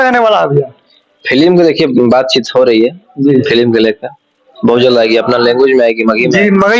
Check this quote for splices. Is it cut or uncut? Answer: uncut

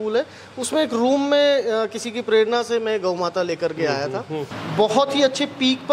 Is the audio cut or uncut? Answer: cut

